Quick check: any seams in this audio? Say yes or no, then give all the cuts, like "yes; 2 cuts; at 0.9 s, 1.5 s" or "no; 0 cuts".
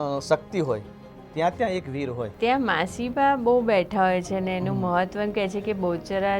yes; 1 cut; at 2.3 s